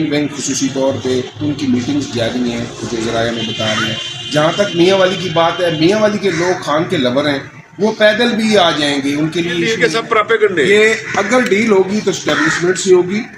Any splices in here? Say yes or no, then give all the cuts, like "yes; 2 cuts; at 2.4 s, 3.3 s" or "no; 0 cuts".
yes; 1 cut; at 9.7 s